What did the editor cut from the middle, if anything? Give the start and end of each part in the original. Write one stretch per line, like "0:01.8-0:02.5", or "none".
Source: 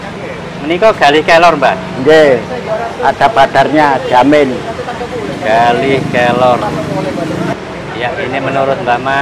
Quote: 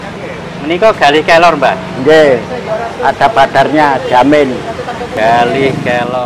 0:05.1-0:05.3

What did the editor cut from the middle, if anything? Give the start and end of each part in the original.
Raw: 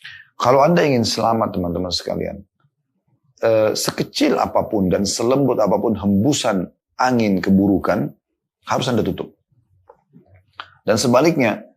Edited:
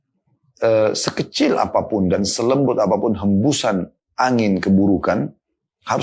none

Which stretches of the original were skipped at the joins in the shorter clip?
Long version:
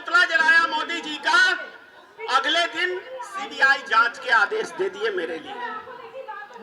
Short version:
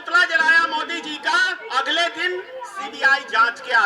0:01.6-0:02.1

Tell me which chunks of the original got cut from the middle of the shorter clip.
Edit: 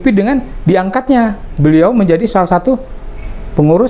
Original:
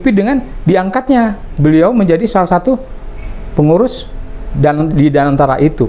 none

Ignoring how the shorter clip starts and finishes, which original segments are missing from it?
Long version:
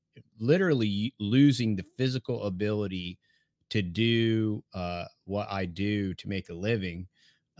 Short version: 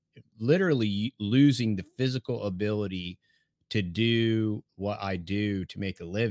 0:04.7-0:05.2

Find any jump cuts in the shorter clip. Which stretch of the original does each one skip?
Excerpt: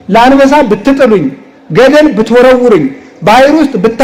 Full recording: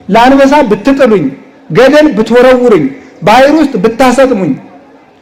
none

